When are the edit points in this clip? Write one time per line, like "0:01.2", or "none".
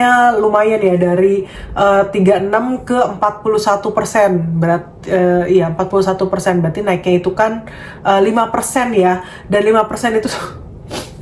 none